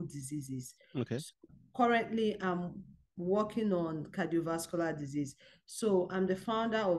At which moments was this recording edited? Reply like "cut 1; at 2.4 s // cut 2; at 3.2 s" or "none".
cut 1; at 1.6 s